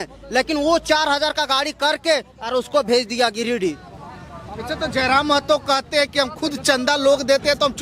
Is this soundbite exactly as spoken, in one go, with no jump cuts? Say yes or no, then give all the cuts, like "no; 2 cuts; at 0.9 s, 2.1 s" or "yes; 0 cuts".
yes; 0 cuts